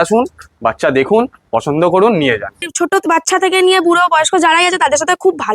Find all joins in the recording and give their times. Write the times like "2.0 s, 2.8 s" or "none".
2.6 s